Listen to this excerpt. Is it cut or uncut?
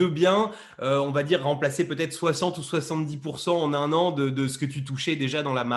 uncut